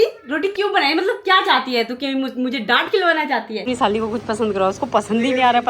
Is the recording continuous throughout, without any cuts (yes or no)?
no